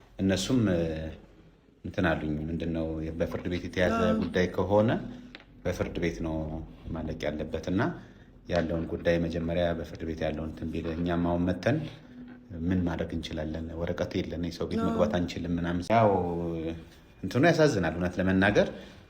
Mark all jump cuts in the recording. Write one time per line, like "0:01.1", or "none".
0:15.8